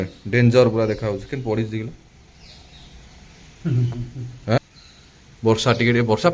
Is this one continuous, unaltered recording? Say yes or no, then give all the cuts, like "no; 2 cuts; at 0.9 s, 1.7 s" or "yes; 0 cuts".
no; 1 cut; at 4.6 s